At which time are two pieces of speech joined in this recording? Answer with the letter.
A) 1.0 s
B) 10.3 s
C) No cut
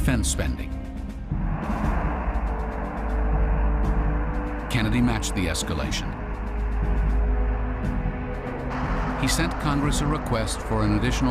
A